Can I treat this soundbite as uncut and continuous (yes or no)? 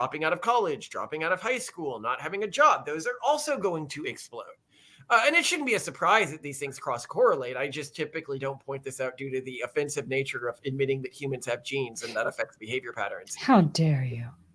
yes